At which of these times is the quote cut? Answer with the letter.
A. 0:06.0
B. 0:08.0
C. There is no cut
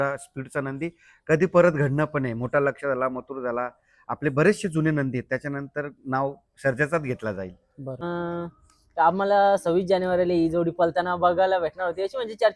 B